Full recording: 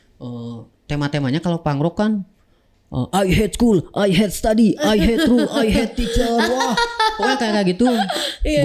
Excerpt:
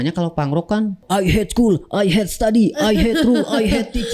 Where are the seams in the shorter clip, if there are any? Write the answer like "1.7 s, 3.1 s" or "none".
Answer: 1.0 s